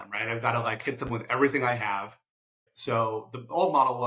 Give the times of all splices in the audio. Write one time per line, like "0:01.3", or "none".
0:02.7